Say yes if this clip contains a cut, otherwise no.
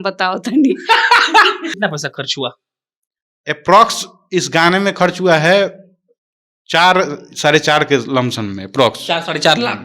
yes